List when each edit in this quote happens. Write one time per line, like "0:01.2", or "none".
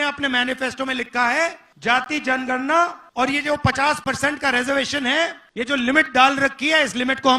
0:01.7
0:03.0
0:05.4